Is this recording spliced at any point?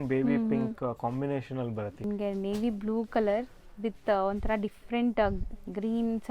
yes; 1 cut; at 2.0 s

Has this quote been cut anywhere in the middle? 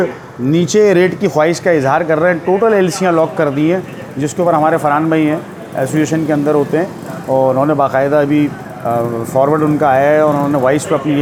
no; 0 cuts

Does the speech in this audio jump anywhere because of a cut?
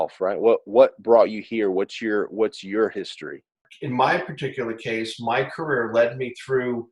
yes; 1 cut; at 3.7 s

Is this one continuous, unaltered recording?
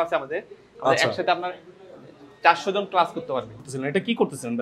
no; 1 cut; at 3.5 s

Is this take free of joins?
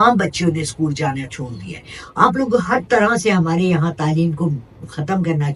yes; 0 cuts

